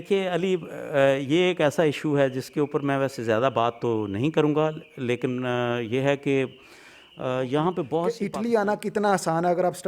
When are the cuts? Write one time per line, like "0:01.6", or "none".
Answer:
0:08.1